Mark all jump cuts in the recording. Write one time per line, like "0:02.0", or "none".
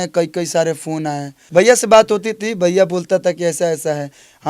0:01.3